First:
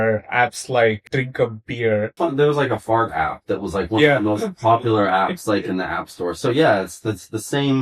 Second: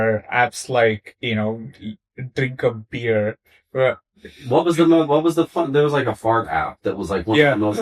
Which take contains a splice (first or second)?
first